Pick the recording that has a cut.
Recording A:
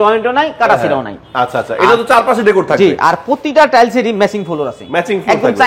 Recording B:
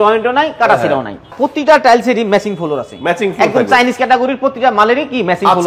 B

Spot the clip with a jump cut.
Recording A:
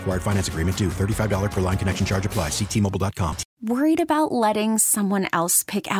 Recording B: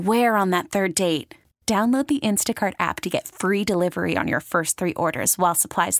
A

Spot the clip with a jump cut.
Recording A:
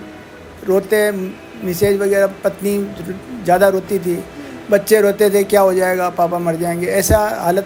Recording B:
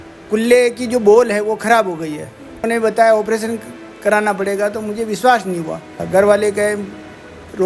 B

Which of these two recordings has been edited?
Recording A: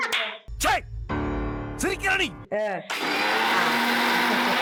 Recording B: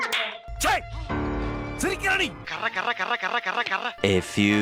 B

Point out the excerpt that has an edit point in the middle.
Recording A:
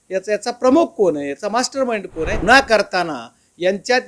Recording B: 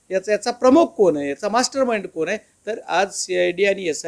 A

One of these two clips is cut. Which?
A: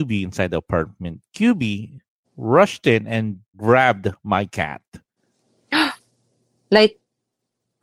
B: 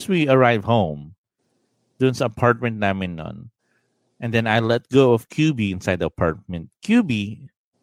A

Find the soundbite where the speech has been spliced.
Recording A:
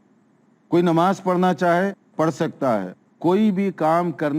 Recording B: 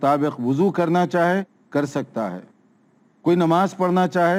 A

